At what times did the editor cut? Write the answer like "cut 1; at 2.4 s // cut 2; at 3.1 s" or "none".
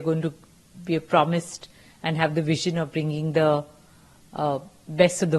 none